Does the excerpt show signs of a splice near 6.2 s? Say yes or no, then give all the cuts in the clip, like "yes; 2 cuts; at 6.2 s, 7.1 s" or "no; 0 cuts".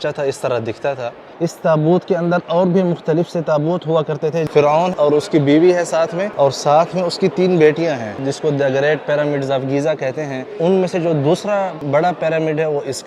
yes; 6 cuts; at 1.3 s, 4.9 s, 6.2 s, 8.2 s, 10.4 s, 11.8 s